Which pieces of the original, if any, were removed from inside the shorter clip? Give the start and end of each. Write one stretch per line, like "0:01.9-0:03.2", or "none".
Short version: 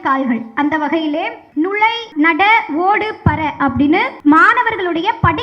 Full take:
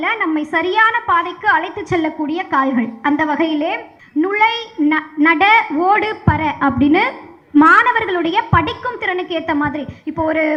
0:04.4-0:04.9
0:07.1-0:07.4